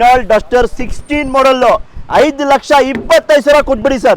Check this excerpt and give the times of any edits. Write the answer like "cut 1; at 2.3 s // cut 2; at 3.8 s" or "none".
none